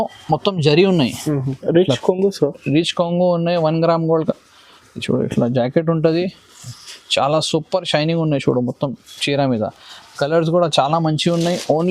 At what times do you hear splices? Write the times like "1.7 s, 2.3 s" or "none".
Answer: 1.5 s